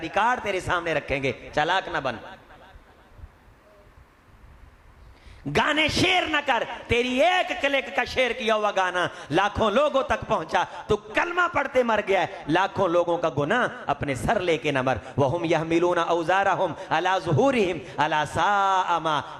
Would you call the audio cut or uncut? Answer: uncut